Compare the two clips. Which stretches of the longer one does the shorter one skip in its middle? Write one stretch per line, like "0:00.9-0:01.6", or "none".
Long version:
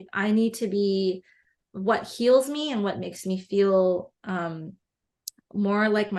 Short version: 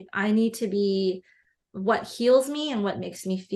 none